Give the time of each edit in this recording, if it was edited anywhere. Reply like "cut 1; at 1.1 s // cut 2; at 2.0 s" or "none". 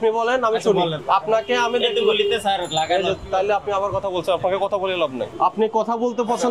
cut 1; at 1.0 s // cut 2; at 5.3 s